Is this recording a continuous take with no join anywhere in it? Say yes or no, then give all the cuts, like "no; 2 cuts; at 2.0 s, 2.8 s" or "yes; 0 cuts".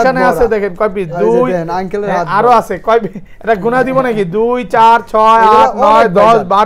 yes; 0 cuts